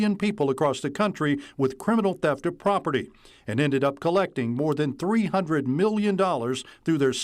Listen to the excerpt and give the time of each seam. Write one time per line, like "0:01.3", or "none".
none